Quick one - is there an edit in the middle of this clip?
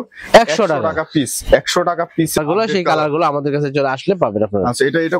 yes; 1 cut; at 2.4 s

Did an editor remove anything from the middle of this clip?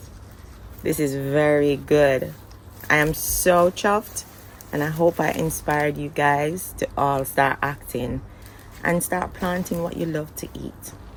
no; 0 cuts

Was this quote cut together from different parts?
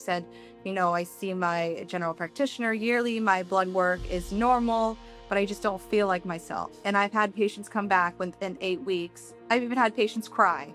yes; 1 cut; at 6.8 s

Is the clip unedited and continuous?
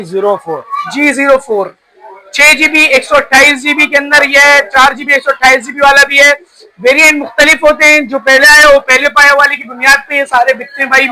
yes; 0 cuts

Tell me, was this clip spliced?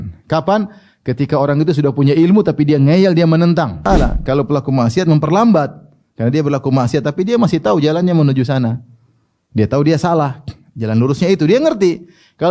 yes; 1 cut; at 3.8 s

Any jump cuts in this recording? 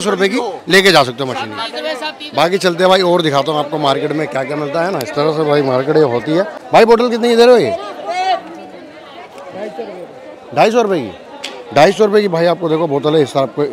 no; 0 cuts

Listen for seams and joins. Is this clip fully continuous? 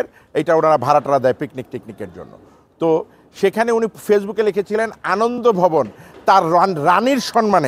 yes; 0 cuts

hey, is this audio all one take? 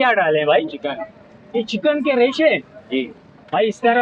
yes; 0 cuts

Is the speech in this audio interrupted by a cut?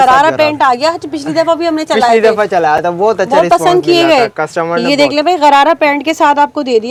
no; 0 cuts

